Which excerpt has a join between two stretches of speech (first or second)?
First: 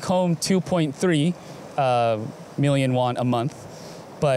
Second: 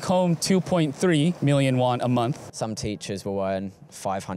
second